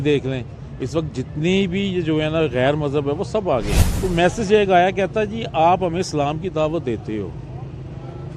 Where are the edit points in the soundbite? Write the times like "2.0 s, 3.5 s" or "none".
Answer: 3.8 s